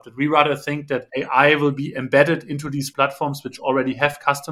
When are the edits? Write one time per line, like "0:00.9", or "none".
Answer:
0:01.1
0:02.9

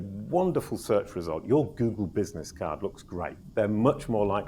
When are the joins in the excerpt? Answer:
0:03.4

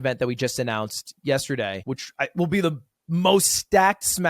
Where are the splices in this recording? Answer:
0:01.8

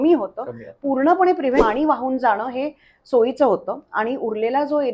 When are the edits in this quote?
0:01.6

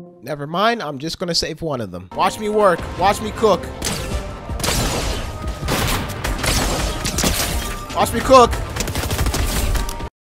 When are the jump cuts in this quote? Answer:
0:02.1

